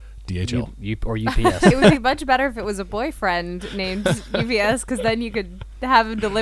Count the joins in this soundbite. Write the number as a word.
one